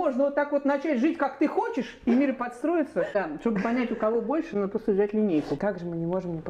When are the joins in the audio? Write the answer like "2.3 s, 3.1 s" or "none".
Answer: 3.1 s, 5.6 s